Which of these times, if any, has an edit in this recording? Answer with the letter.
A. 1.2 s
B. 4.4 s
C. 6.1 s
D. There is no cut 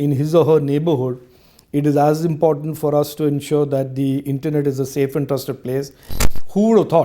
C